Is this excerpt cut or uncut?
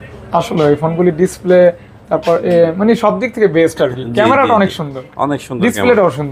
uncut